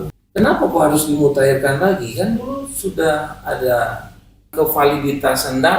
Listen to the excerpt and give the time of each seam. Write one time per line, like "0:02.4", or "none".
0:04.5

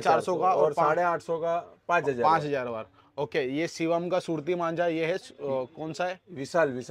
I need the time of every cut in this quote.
none

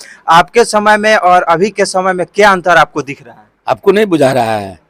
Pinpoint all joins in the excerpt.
none

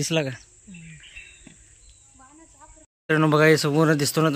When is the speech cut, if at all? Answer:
0:02.8

